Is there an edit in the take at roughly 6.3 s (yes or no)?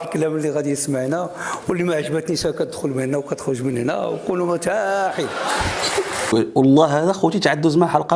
yes